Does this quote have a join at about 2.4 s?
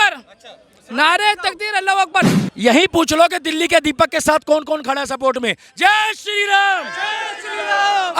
yes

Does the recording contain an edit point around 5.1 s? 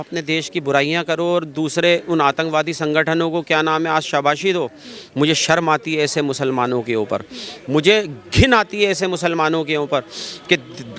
no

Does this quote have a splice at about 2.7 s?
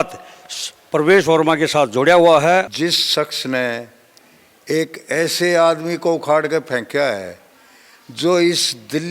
yes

